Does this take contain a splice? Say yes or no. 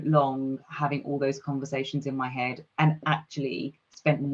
no